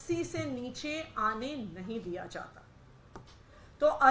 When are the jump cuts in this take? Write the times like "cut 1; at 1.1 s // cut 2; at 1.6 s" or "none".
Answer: none

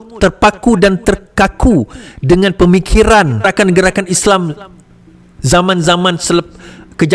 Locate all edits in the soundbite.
cut 1; at 3.4 s

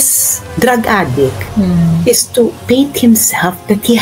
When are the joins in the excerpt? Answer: cut 1; at 2.6 s

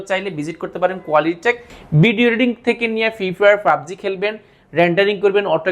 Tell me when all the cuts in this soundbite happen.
cut 1; at 1.7 s

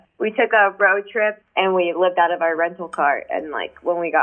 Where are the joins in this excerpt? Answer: cut 1; at 1.4 s

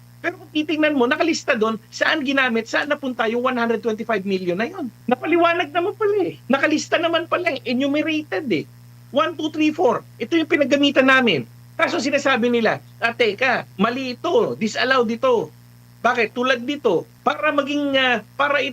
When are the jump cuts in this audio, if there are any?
cut 1; at 5.0 s // cut 2; at 6.4 s // cut 3; at 13.7 s // cut 4; at 17.1 s

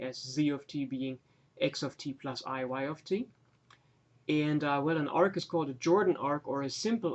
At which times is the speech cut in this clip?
cut 1; at 4.5 s

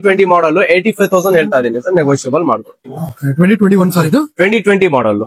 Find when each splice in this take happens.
none

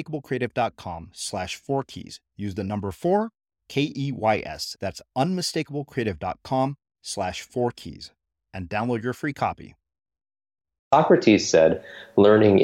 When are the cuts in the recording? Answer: cut 1; at 10.9 s

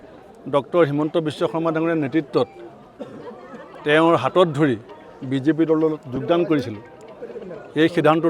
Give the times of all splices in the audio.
none

